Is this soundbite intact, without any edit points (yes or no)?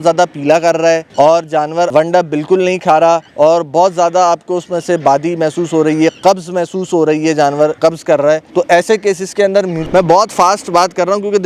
no